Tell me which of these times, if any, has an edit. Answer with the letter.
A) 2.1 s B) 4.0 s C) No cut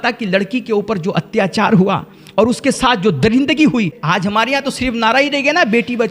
B